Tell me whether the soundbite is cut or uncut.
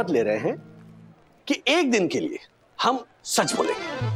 uncut